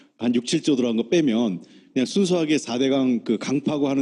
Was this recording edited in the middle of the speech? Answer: no; 0 cuts

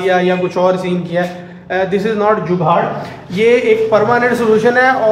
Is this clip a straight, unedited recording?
yes; 0 cuts

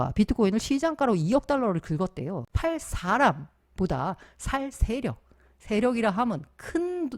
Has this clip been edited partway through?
yes; 1 cut; at 2.5 s

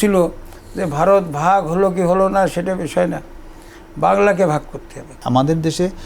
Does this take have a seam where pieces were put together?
yes; 1 cut; at 5.2 s

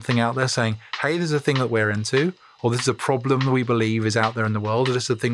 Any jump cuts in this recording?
no; 0 cuts

